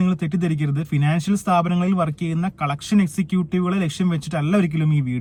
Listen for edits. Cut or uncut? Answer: uncut